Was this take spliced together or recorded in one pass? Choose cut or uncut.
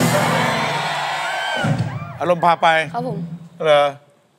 uncut